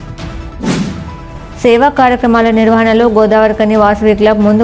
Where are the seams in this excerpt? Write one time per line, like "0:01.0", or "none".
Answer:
0:01.0